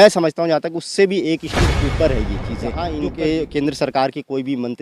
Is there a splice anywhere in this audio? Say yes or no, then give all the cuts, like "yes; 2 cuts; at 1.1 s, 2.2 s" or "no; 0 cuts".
yes; 1 cut; at 2.8 s